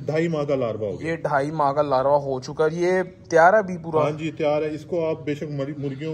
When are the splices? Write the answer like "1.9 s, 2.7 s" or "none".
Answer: none